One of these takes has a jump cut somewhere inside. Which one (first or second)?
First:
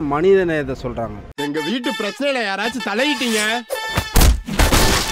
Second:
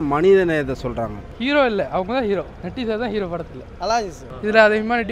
second